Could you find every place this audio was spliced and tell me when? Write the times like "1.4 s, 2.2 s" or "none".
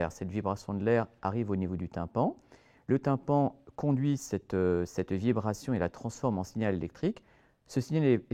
none